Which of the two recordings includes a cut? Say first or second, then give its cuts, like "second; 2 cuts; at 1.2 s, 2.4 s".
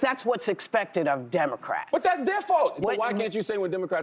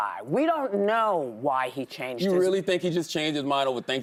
first; 1 cut; at 2.8 s